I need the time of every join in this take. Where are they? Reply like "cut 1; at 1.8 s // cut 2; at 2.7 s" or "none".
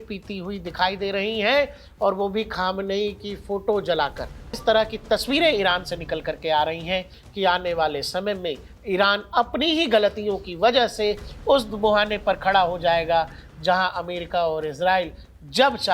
cut 1; at 4.5 s // cut 2; at 7.2 s